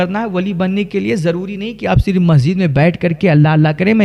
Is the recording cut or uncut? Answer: uncut